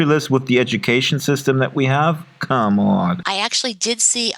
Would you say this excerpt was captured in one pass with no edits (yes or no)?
no